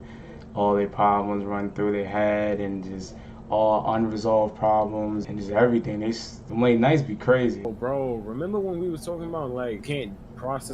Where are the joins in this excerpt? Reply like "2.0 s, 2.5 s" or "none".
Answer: 5.3 s, 6.3 s, 7.7 s, 9.8 s